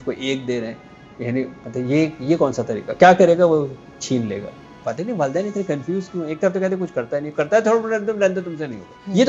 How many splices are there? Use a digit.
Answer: 1